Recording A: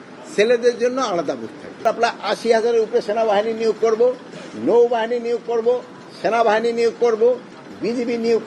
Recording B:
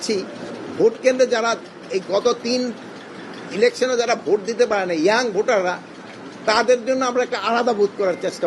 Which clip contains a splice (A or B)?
A